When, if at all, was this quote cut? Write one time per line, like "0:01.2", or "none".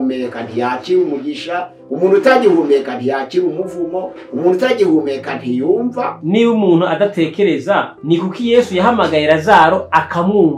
0:06.2
0:07.9